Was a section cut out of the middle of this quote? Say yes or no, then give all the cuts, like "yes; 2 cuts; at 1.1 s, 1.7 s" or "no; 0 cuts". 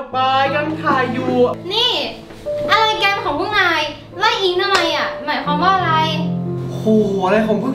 yes; 1 cut; at 1.6 s